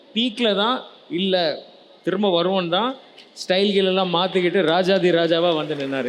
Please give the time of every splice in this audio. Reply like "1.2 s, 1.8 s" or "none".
none